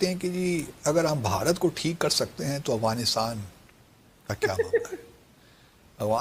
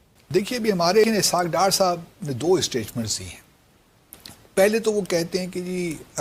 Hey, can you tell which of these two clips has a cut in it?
second; 1 cut; at 1.1 s

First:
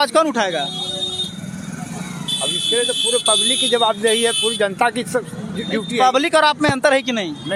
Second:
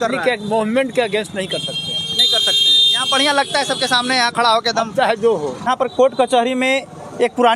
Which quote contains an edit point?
second; 1 cut; at 5.7 s

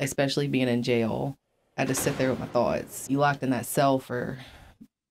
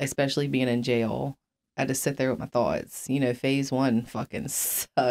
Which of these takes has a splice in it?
first; 1 cut; at 2.9 s

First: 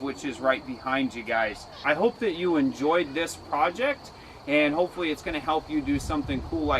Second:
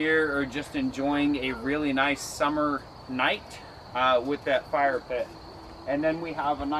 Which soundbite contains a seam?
first; 1 cut; at 1.7 s

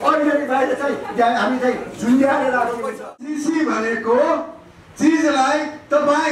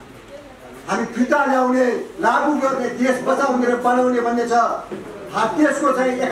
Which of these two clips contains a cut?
first; 1 cut; at 3.2 s

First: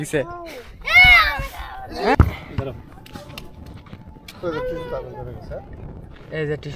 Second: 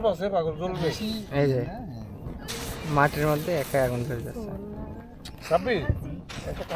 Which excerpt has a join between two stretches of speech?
first; 1 cut; at 2.1 s

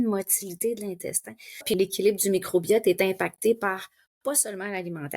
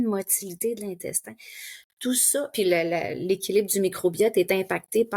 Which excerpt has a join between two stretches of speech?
first; 1 cut; at 1.7 s

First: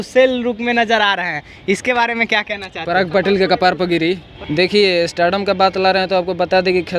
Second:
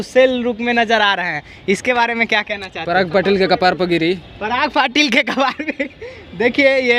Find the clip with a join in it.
first; 1 cut; at 4.3 s

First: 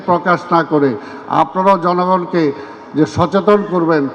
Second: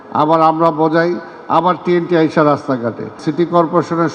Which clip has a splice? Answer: second; 1 cut; at 3.2 s

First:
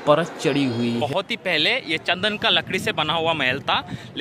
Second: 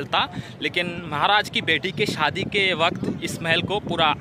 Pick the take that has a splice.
first; 1 cut; at 1.0 s

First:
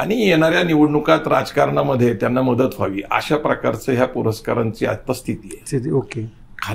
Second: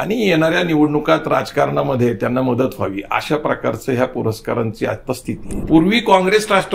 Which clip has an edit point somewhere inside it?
second; 1 cut; at 5.5 s

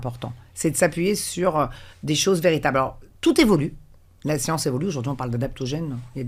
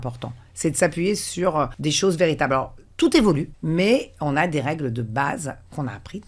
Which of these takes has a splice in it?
second; 2 cuts; at 1.7 s, 3.5 s

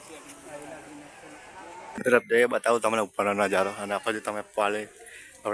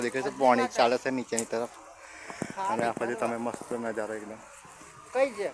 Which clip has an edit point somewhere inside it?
first; 1 cut; at 1.8 s

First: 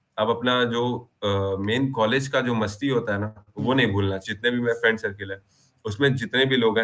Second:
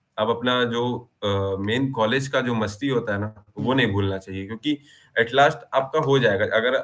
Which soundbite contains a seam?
first; 1 cut; at 4.3 s

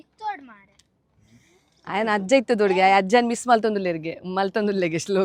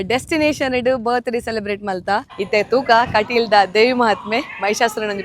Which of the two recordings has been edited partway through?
second; 1 cut; at 2.3 s

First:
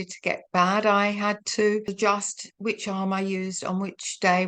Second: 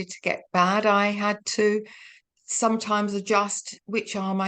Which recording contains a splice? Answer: first; 1 cut; at 1.9 s

